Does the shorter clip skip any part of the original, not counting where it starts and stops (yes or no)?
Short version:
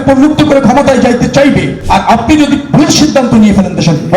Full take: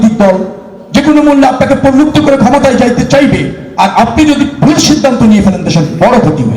yes